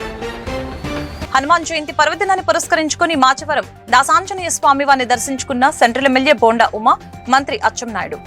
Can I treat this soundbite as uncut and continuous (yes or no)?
no